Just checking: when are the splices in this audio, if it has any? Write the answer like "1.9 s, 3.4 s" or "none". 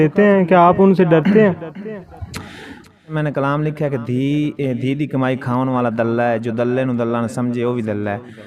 2.9 s